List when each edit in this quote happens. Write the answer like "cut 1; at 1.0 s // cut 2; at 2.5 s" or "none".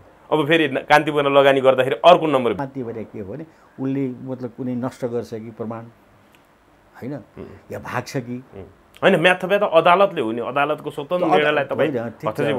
cut 1; at 2.6 s